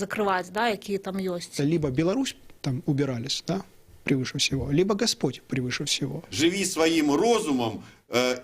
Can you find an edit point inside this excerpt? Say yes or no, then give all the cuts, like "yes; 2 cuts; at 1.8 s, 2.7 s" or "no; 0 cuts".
yes; 2 cuts; at 1.5 s, 6.3 s